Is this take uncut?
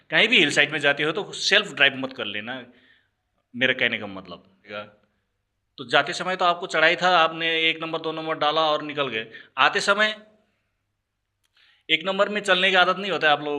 no; 1 cut; at 4.7 s

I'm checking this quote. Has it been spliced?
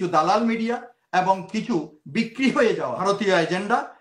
yes; 1 cut; at 3.0 s

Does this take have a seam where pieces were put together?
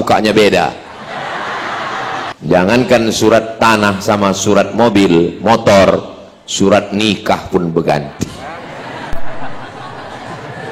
yes; 1 cut; at 2.2 s

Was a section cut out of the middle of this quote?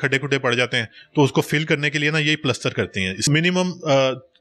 yes; 1 cut; at 3.2 s

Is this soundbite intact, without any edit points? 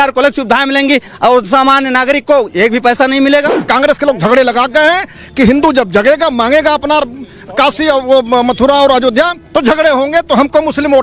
no; 1 cut; at 3.6 s

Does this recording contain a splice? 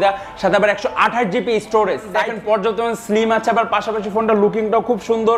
yes; 1 cut; at 2.3 s

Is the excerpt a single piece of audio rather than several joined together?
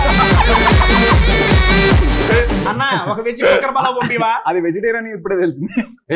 no; 1 cut; at 2.7 s

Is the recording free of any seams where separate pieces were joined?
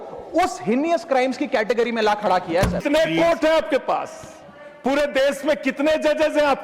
no; 1 cut; at 2.8 s

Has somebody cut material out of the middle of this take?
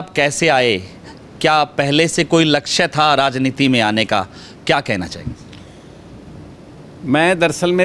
no; 0 cuts

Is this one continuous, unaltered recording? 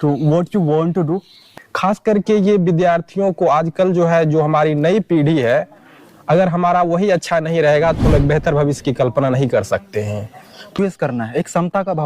no; 2 cuts; at 1.5 s, 10.7 s

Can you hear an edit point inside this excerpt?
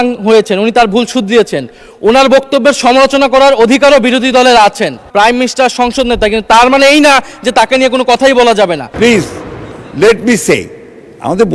yes; 2 cuts; at 5.0 s, 8.9 s

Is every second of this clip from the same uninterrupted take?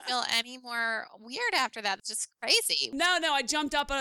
no; 1 cut; at 2.8 s

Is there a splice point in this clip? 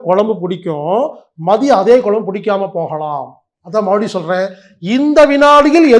no; 0 cuts

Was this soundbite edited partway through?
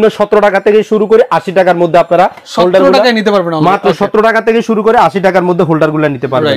no; 0 cuts

